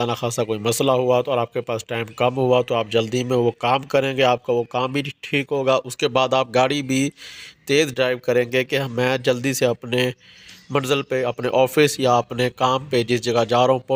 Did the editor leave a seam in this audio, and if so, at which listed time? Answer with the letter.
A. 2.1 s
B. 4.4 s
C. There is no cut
C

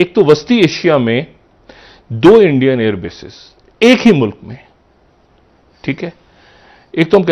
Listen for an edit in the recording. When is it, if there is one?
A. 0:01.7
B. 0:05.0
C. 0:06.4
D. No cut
D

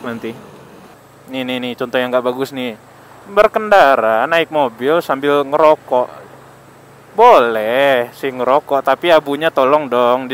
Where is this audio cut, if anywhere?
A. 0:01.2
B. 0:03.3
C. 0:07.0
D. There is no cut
A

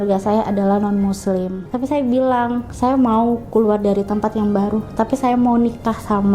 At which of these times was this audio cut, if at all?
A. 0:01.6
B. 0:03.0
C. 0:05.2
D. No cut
A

